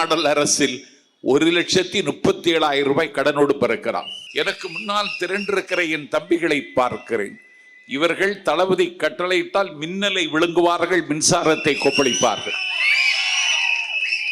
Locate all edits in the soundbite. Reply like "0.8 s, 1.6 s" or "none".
4.2 s